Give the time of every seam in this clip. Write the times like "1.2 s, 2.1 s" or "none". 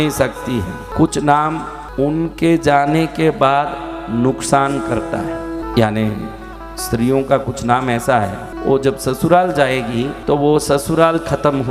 0.8 s, 1.8 s, 5.7 s, 8.5 s, 10.2 s